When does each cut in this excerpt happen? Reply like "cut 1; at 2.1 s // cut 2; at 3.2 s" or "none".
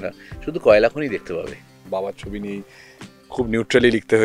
cut 1; at 1.9 s